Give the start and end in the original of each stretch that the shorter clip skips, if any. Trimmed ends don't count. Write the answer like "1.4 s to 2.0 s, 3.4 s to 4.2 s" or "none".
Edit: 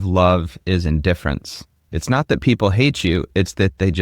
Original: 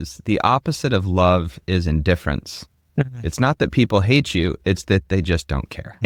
2.8 s to 3.1 s